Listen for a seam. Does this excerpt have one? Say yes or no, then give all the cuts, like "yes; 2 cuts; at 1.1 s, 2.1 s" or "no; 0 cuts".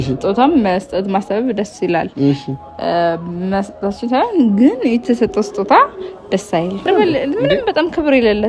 yes; 1 cut; at 6.9 s